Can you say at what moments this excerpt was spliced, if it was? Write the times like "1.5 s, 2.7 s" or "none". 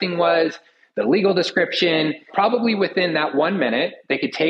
2.3 s